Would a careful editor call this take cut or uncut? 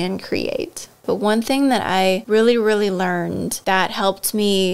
cut